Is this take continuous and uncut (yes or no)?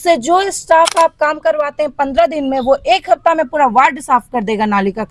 yes